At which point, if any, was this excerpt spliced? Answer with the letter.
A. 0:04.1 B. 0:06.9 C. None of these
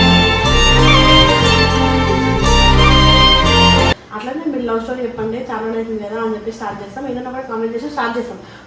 A